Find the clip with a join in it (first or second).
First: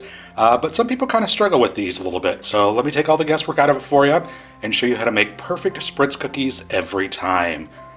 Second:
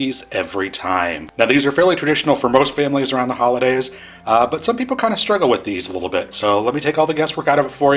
second